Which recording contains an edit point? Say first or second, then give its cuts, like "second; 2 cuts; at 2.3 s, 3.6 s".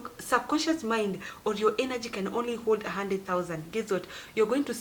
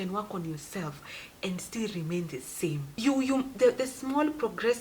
second; 1 cut; at 2.9 s